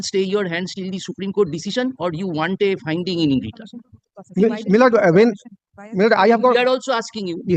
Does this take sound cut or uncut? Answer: uncut